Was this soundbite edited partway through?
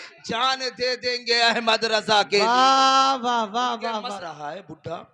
yes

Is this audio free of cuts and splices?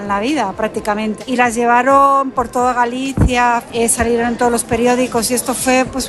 no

